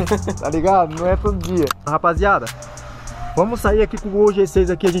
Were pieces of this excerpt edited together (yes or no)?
yes